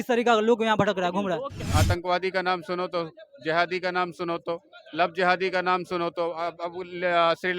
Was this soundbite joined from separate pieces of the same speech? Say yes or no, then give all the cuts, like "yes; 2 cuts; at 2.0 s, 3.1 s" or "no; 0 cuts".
yes; 1 cut; at 1.7 s